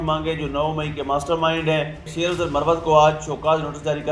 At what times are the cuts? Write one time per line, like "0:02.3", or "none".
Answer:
0:02.1